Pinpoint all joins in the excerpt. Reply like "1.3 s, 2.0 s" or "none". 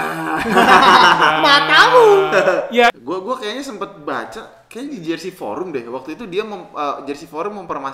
2.9 s